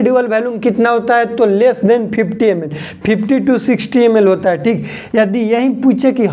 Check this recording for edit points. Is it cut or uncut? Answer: uncut